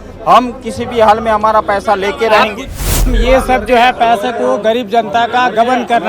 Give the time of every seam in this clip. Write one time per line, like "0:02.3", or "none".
0:02.7